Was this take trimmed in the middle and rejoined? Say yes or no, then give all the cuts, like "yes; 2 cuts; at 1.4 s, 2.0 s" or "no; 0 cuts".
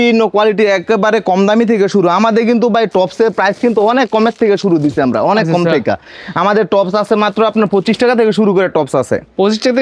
no; 0 cuts